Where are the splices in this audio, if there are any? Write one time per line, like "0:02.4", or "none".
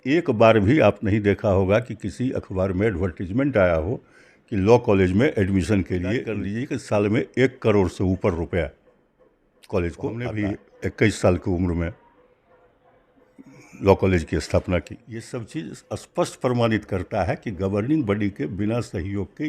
0:06.5
0:10.3
0:15.4